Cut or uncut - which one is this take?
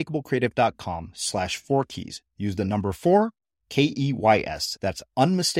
uncut